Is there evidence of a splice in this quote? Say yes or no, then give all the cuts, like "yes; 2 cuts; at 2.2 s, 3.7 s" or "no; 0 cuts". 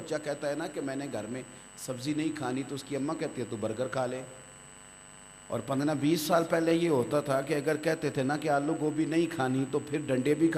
no; 0 cuts